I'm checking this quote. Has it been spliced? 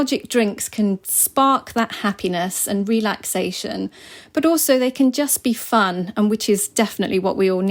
no; 0 cuts

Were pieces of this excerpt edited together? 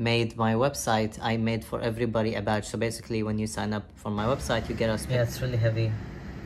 yes; 1 cut; at 5.0 s

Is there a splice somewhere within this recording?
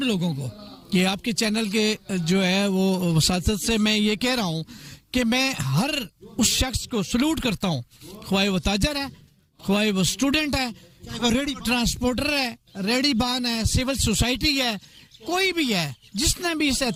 no; 0 cuts

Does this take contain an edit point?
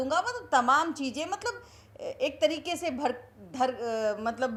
no; 0 cuts

